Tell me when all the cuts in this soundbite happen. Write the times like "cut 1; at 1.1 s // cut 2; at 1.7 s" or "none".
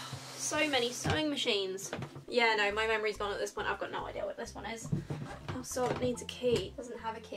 none